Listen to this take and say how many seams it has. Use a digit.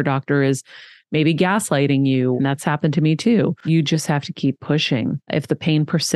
3